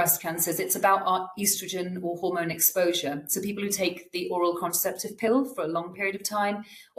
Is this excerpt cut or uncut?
uncut